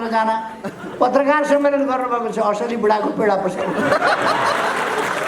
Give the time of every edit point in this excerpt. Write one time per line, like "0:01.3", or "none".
none